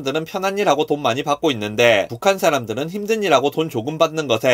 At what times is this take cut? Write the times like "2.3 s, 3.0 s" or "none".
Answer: none